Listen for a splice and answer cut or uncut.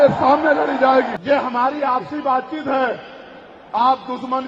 cut